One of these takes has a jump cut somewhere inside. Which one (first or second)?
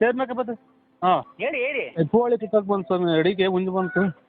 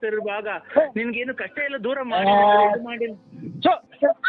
first